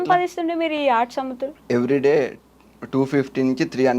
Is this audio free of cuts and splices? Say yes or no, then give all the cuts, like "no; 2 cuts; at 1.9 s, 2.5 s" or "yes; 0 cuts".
no; 1 cut; at 1.5 s